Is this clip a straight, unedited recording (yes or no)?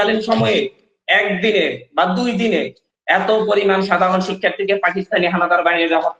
yes